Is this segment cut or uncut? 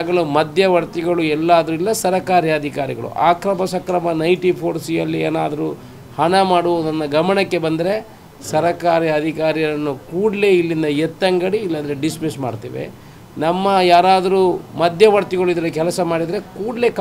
uncut